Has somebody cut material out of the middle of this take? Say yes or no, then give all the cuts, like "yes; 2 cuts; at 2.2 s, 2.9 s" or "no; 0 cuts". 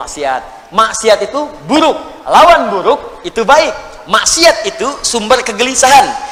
no; 0 cuts